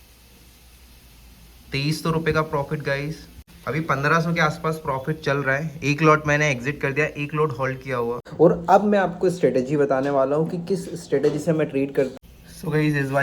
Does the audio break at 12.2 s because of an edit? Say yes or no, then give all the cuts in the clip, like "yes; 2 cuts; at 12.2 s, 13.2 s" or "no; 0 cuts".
yes; 2 cuts; at 8.2 s, 12.2 s